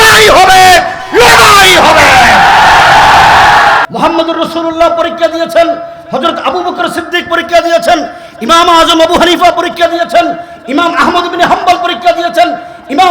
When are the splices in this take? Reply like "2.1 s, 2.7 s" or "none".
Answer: 3.8 s